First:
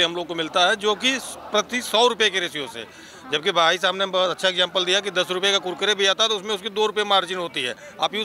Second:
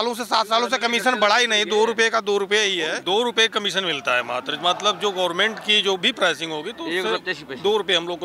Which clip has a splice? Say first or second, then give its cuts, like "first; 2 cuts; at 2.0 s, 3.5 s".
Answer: second; 1 cut; at 3.0 s